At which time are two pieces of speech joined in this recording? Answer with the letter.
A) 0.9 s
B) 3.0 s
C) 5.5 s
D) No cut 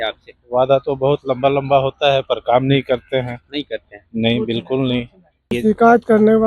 C